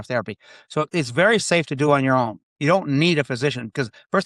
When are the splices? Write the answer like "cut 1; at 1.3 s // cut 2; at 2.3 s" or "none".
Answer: none